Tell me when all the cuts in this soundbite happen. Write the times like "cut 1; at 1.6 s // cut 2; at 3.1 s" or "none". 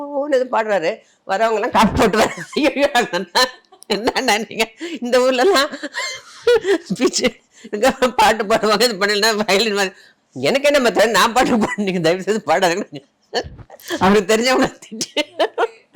none